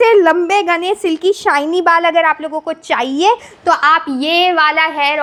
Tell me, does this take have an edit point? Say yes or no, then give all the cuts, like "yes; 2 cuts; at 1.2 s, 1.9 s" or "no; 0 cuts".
no; 0 cuts